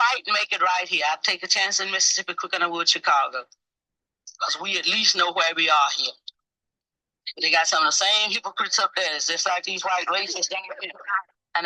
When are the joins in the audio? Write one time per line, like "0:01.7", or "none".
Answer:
none